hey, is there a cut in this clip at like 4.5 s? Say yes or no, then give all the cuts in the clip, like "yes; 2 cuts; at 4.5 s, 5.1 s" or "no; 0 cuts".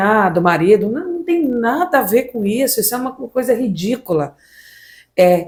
no; 0 cuts